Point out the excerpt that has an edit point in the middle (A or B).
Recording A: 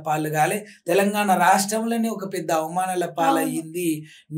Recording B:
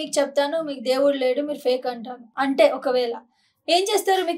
B